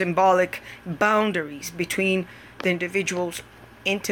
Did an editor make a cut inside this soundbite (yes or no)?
no